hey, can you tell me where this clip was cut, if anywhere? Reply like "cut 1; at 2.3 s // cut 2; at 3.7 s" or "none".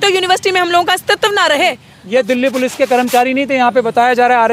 cut 1; at 1.9 s